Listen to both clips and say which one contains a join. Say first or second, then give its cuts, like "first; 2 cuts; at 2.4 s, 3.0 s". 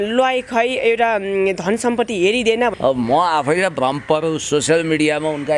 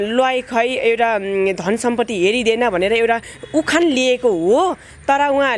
first; 1 cut; at 2.7 s